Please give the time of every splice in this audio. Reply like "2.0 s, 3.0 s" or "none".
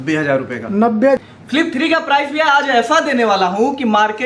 1.2 s